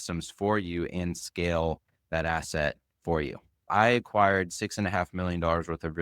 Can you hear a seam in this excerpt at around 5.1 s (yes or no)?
no